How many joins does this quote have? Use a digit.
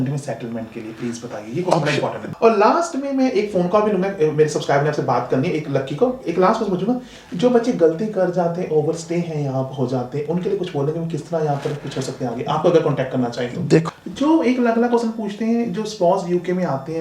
2